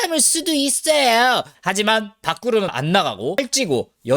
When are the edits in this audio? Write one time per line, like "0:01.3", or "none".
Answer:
0:01.5